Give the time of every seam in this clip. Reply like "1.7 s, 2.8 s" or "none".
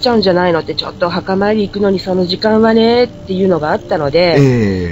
none